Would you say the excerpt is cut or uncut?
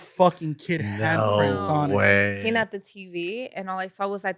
cut